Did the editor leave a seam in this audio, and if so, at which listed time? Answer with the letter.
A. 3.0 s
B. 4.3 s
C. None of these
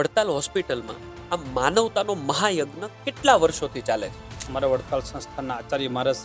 B